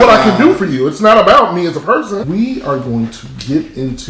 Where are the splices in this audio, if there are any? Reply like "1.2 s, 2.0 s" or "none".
2.2 s